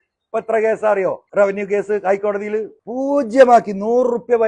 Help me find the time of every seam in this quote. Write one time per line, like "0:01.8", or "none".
0:01.2
0:02.8

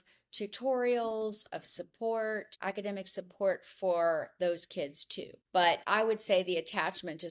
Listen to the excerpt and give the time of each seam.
none

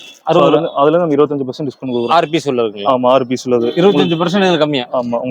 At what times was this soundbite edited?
none

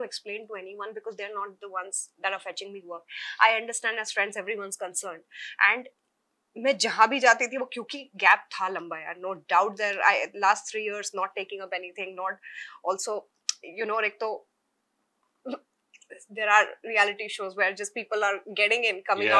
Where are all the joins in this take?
none

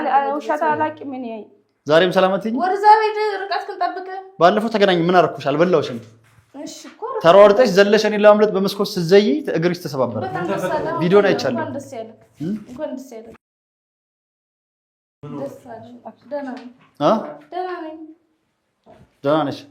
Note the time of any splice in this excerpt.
none

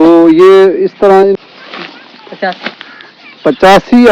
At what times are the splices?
0:01.4

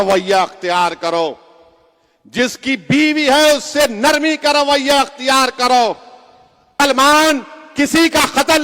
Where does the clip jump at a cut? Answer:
0:06.8

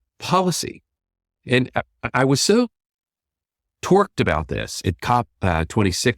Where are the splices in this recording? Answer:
0:01.3

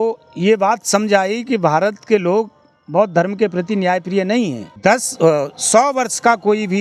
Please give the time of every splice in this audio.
0:04.7

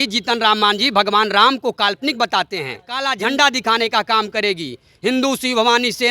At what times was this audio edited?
0:03.1

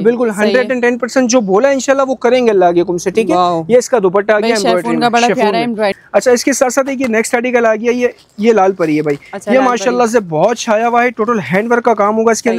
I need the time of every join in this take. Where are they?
0:06.0

